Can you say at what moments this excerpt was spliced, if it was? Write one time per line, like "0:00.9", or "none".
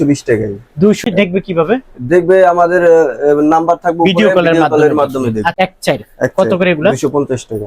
0:01.0
0:05.5

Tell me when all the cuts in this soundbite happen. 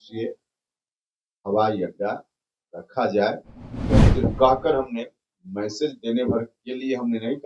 0:04.0

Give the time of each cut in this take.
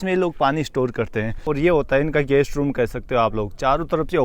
0:01.4

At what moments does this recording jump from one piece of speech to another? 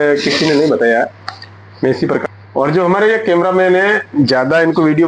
0:02.2

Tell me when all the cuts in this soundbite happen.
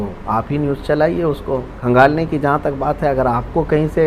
0:01.7

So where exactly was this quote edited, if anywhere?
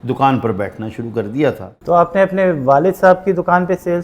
0:01.7

